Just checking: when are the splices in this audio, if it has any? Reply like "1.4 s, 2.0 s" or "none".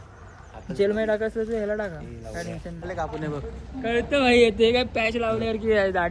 2.8 s